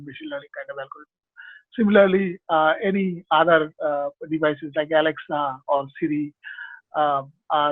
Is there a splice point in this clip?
no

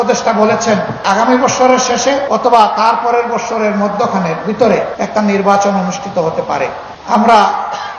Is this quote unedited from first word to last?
no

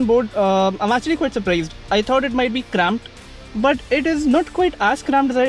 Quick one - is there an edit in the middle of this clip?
no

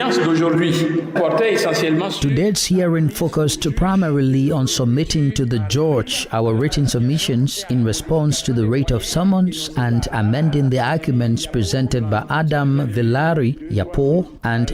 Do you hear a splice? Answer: no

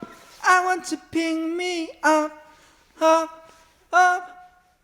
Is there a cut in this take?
no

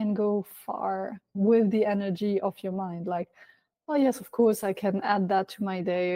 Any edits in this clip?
no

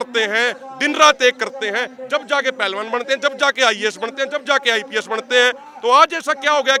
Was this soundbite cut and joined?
no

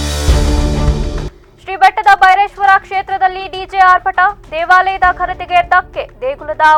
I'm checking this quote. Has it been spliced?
no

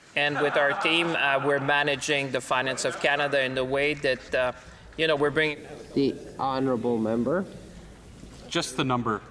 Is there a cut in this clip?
no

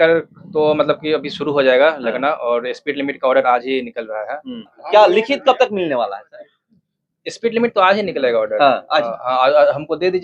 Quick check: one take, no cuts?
no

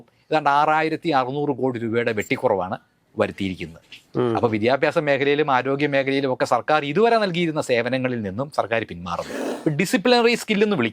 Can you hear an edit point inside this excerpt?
yes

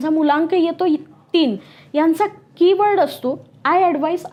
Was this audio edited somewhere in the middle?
no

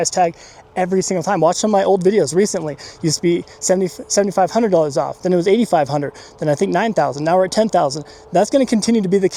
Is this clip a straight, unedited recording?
yes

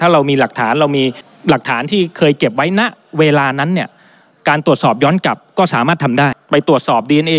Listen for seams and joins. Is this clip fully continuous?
no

